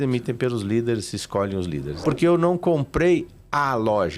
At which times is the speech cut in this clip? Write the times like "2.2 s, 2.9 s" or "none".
1.9 s